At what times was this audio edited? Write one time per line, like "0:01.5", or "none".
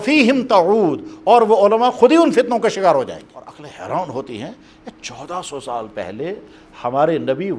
0:03.6